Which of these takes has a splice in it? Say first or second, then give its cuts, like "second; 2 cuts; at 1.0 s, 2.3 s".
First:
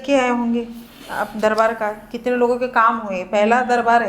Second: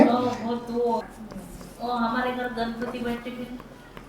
second; 1 cut; at 1.1 s